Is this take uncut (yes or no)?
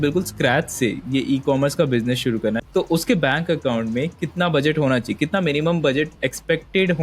no